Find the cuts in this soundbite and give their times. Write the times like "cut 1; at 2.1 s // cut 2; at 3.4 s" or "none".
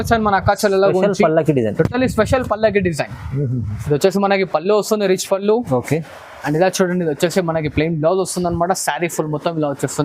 none